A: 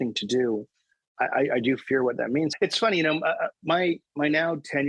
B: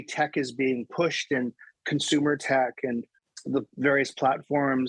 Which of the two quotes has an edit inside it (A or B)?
A